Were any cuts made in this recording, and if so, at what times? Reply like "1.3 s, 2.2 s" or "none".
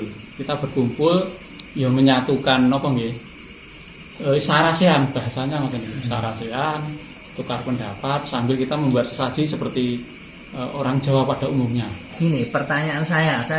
12.1 s